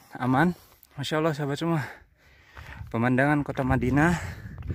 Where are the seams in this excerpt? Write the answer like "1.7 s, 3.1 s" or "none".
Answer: 1.0 s